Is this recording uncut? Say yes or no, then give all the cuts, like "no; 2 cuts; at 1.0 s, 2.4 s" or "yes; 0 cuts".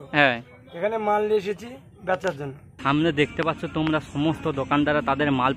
no; 1 cut; at 2.6 s